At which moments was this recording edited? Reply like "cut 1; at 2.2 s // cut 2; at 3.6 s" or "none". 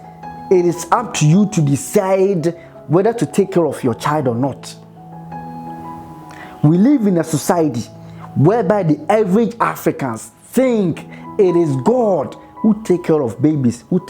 cut 1; at 4.7 s // cut 2; at 6.0 s